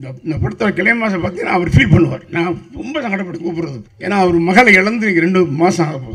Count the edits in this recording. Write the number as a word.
one